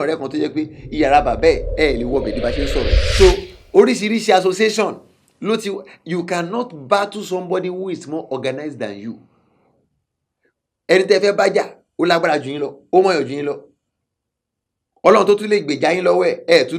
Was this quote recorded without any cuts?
no; 1 cut; at 3.0 s

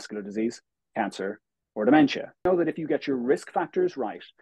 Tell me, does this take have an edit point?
yes; 1 cut; at 2.4 s

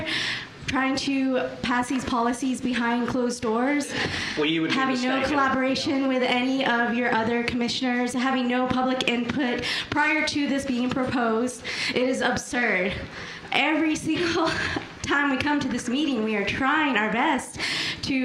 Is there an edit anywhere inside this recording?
no; 0 cuts

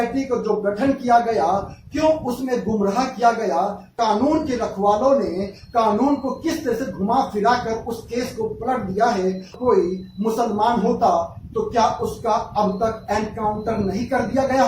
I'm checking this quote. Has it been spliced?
yes; 2 cuts; at 3.9 s, 9.5 s

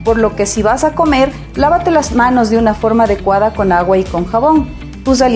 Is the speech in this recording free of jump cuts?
yes; 0 cuts

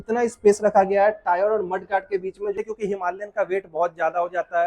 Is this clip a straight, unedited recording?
no; 1 cut; at 2.6 s

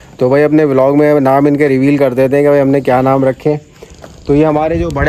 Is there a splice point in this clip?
no; 0 cuts

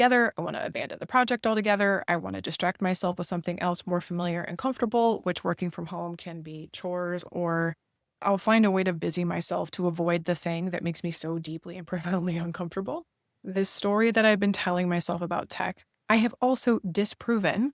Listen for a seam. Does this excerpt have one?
no; 0 cuts

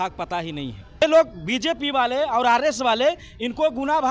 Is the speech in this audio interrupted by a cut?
yes; 1 cut; at 1.0 s

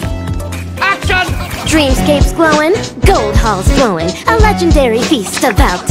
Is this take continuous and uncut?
yes; 0 cuts

